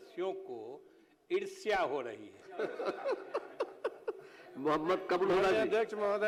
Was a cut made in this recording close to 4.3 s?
no; 0 cuts

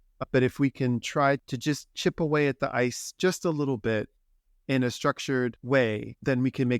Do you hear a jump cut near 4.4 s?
no; 2 cuts; at 1.4 s, 5.6 s

